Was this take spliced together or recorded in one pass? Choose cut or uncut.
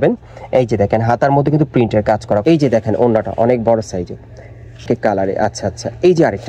cut